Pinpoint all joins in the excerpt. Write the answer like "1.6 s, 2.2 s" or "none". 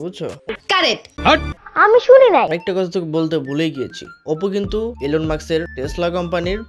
2.5 s